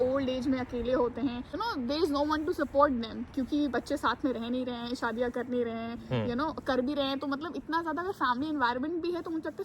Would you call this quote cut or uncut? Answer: cut